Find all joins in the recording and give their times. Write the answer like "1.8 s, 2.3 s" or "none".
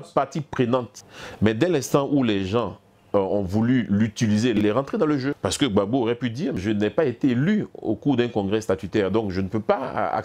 1.0 s, 4.6 s, 5.4 s, 6.6 s